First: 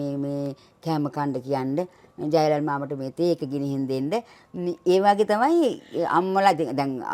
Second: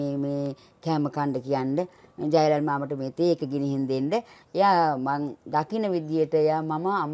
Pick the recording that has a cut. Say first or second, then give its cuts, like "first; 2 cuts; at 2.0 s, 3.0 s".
second; 1 cut; at 4.4 s